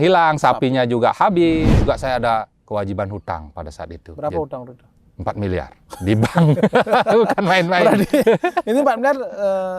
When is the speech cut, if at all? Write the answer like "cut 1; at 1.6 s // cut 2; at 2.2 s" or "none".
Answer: cut 1; at 1.8 s